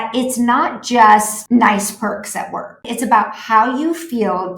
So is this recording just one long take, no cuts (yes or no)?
no